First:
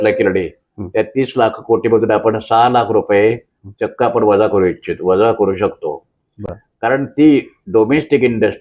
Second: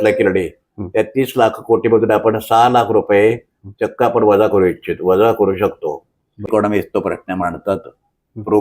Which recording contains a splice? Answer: second; 1 cut; at 6.5 s

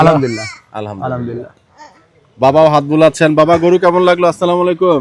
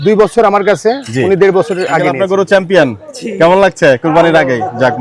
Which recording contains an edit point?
second; 1 cut; at 2.1 s

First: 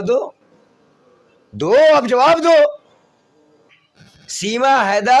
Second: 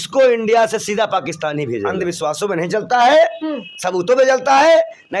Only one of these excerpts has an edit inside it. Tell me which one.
second; 1 cut; at 1.9 s

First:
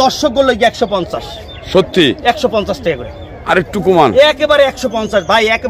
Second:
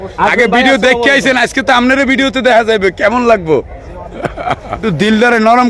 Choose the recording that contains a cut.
second; 1 cut; at 4.8 s

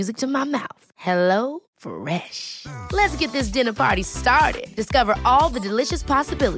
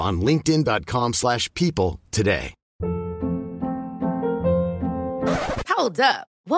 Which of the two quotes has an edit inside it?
second; 1 cut; at 2.6 s

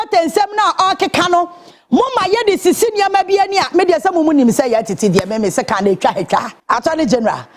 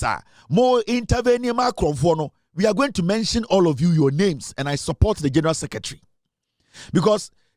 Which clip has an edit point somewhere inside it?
first; 1 cut; at 6.5 s

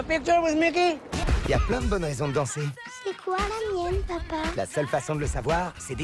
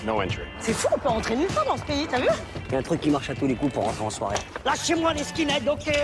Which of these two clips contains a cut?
first; 1 cut; at 1.2 s

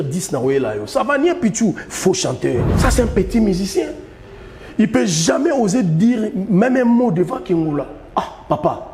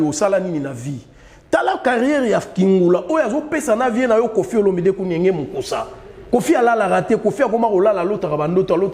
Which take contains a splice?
first; 1 cut; at 2.7 s

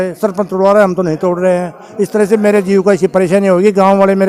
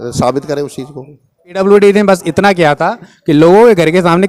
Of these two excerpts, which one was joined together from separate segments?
second; 1 cut; at 1.6 s

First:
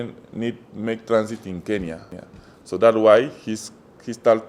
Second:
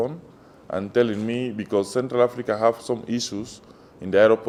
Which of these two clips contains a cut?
first; 1 cut; at 2.1 s

